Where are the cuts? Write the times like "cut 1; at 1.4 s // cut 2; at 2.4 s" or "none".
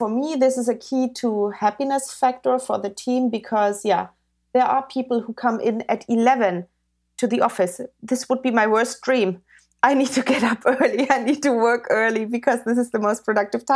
none